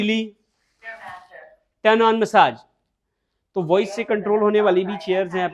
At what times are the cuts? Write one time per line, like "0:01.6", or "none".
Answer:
none